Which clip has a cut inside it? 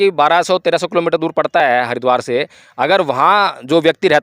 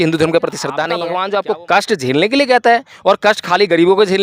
second; 1 cut; at 1.0 s

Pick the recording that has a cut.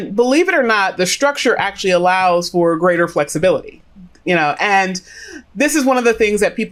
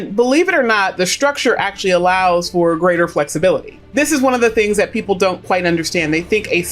second; 1 cut; at 3.8 s

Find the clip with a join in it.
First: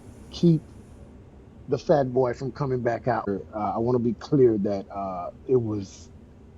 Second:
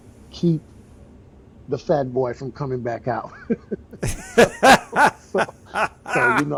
first; 1 cut; at 3.3 s

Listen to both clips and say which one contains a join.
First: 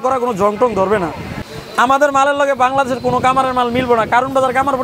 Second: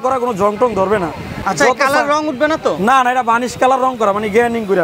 first; 1 cut; at 1.4 s

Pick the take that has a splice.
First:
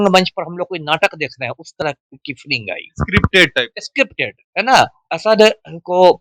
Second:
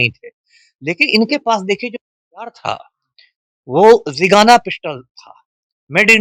first; 1 cut; at 5.0 s

